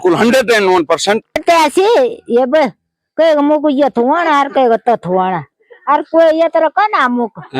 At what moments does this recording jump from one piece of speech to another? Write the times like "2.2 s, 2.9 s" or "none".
1.4 s